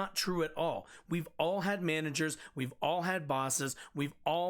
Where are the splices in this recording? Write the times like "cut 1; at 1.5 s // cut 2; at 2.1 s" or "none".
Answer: none